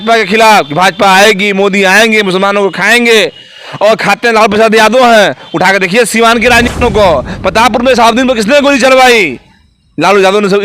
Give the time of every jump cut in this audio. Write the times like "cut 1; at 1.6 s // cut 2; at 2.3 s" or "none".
cut 1; at 6.8 s